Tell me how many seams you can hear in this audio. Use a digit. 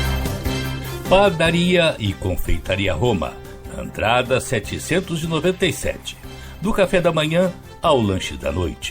1